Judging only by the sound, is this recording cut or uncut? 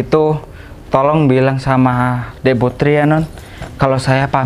uncut